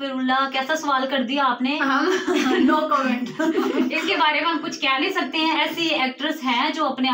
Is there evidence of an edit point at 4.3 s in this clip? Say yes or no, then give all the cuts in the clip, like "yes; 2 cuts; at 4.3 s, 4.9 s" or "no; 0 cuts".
no; 0 cuts